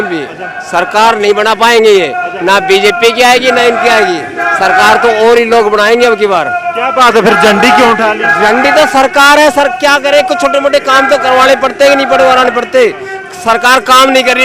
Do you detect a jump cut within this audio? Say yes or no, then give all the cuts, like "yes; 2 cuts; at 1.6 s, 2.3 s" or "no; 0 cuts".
no; 0 cuts